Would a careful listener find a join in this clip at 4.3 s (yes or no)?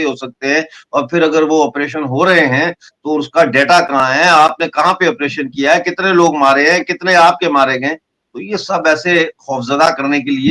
no